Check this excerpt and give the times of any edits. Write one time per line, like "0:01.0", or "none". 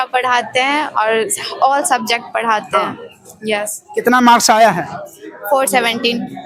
none